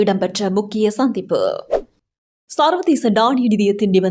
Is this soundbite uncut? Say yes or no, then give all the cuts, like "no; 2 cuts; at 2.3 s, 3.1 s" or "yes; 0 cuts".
yes; 0 cuts